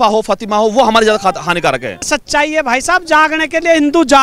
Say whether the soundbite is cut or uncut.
cut